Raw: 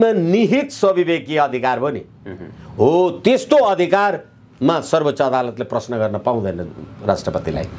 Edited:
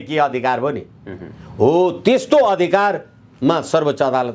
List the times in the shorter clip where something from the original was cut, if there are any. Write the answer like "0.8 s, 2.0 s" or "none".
none